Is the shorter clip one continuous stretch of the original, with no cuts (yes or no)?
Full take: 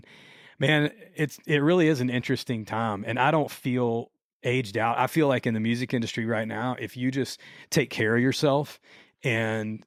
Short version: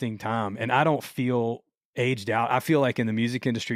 yes